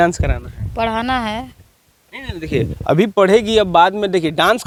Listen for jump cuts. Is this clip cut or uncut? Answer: uncut